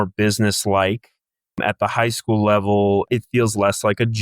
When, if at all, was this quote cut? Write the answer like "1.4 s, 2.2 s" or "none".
1.6 s, 3.1 s